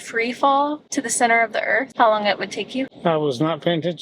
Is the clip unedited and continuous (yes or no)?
no